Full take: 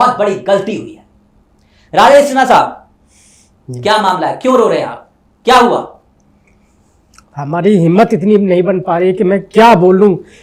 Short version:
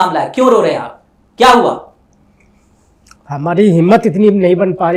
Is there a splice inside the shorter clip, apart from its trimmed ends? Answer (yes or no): no